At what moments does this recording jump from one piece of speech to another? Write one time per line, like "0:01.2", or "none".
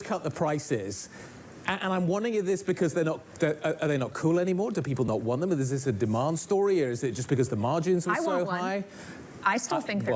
none